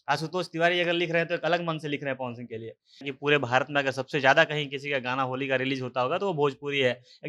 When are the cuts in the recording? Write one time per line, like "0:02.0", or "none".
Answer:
0:03.1